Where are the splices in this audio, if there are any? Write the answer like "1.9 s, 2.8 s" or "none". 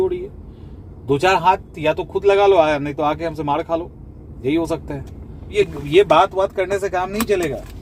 5.5 s